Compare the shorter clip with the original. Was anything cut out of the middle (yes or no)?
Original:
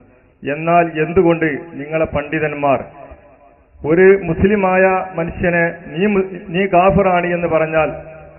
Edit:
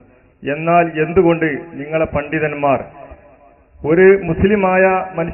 no